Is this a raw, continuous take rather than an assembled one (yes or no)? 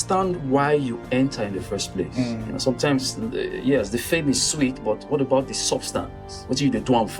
yes